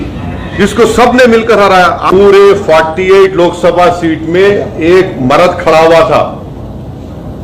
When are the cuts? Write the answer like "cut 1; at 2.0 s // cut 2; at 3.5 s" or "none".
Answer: cut 1; at 2.1 s